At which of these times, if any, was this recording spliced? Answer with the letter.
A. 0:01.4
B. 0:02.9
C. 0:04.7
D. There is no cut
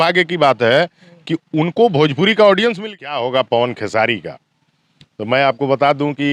B